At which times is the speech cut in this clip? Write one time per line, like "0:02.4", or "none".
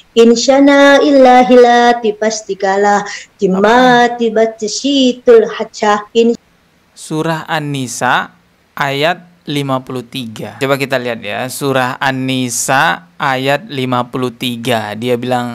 0:10.6